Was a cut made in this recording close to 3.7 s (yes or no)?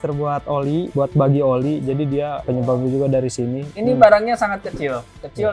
yes